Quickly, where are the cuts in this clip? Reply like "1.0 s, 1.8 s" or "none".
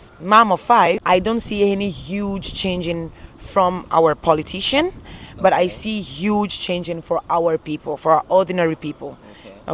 1.0 s